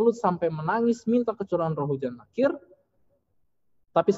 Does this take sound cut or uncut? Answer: uncut